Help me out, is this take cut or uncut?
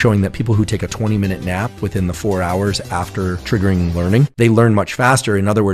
cut